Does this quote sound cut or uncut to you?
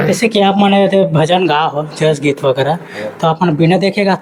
uncut